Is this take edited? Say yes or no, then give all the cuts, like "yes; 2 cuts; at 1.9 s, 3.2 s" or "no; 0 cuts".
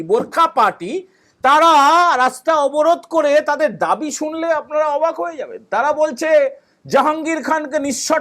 no; 0 cuts